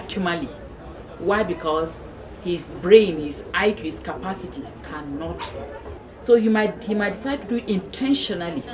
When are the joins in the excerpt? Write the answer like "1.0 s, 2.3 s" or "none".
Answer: 5.9 s